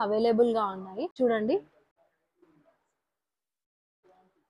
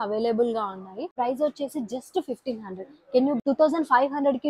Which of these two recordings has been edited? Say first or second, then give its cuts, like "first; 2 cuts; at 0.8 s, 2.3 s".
second; 2 cuts; at 1.1 s, 3.4 s